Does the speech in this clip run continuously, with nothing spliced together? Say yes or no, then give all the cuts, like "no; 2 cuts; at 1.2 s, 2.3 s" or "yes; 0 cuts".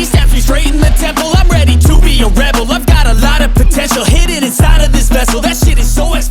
yes; 0 cuts